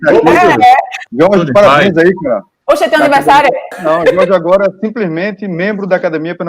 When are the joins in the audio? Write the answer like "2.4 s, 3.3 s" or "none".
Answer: 1.0 s, 2.5 s, 3.7 s